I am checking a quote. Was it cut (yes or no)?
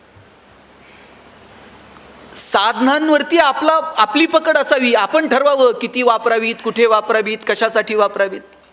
no